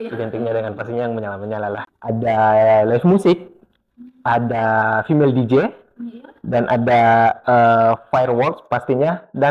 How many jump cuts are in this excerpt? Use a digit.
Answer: 1